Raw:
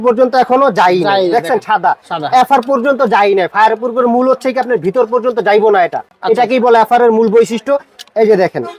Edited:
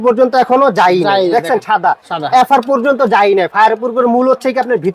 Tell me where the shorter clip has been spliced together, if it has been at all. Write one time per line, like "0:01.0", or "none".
none

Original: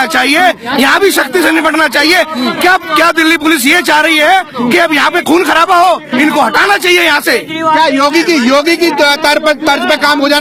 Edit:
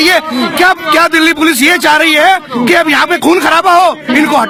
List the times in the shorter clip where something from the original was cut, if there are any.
none

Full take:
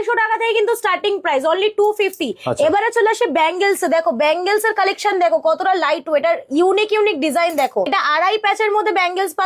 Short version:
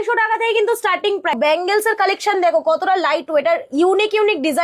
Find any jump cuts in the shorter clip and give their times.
0:01.3

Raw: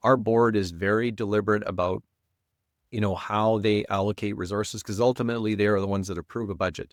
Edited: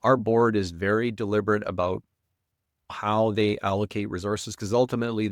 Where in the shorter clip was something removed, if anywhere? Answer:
0:02.9

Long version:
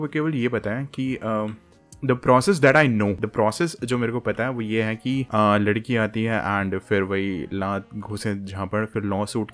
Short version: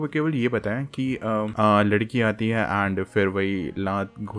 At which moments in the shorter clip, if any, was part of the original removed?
0:01.5

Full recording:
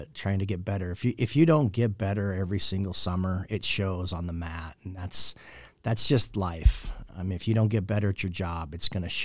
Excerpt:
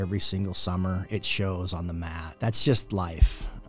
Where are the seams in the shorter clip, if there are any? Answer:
0:02.2

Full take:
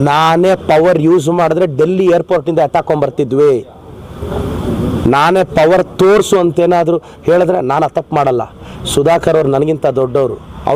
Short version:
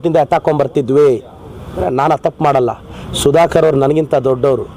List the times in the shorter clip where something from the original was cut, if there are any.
0:01.8

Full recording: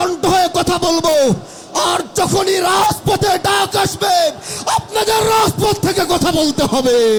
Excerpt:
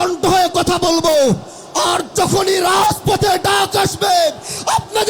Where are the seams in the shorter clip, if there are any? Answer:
none

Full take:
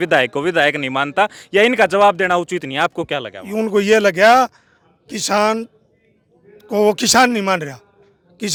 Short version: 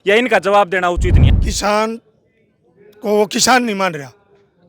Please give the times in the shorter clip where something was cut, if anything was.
0:01.2

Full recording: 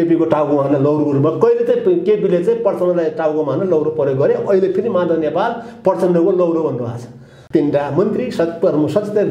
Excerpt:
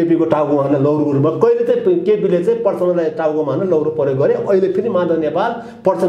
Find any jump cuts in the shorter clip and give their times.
none

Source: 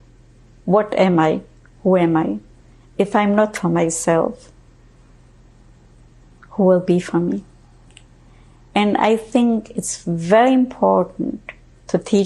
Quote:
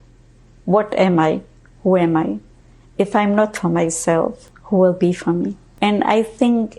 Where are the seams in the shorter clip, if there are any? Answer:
0:04.5
0:05.6

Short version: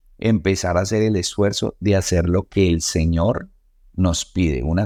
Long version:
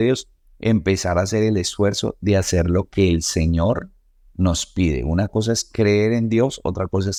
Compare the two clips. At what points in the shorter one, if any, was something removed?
none

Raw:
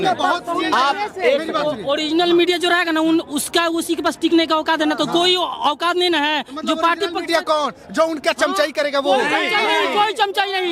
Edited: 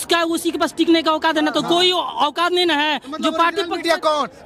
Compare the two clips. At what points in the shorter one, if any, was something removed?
none

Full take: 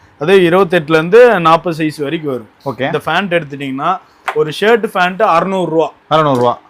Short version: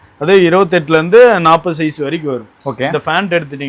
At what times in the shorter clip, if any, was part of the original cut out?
none

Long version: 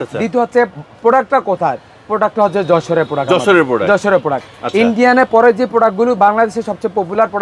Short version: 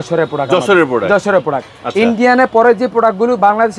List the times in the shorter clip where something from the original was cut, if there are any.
none

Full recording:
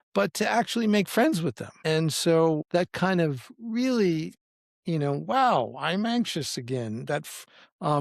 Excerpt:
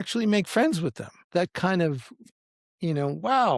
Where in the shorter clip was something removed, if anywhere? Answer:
0:01.2
0:02.3

